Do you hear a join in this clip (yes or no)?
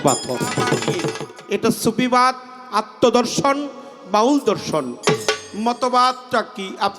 yes